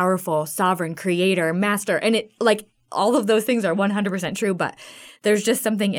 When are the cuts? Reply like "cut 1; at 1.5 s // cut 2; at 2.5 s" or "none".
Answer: none